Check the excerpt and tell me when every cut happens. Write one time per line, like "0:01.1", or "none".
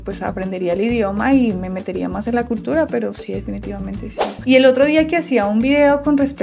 0:04.4